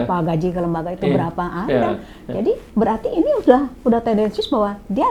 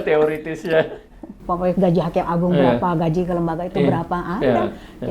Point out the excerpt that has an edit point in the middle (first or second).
second